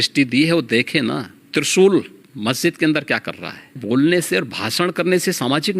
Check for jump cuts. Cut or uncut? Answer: cut